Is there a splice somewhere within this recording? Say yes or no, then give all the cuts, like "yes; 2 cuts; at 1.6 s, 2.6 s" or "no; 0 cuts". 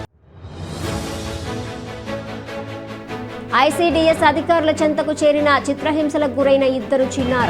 no; 0 cuts